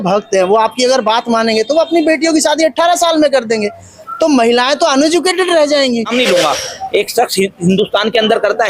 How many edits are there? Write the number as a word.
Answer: one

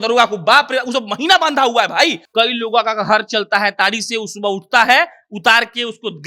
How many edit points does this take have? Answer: one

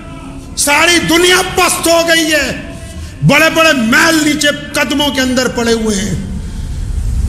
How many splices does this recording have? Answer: zero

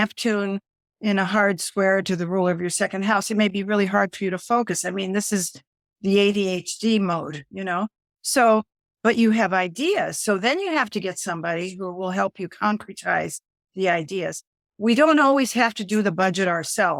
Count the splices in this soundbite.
zero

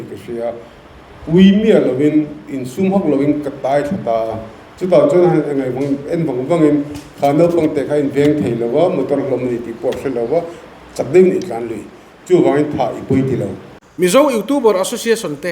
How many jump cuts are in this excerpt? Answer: one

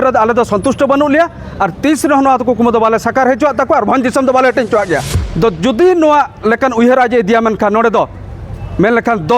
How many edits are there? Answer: one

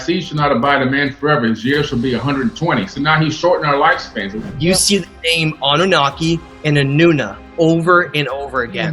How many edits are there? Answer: one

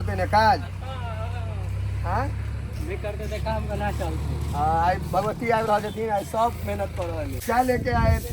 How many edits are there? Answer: one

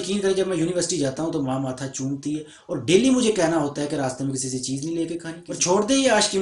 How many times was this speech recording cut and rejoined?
one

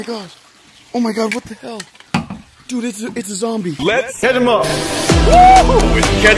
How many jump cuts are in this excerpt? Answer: one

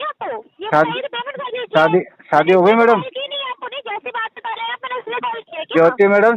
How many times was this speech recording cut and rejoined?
zero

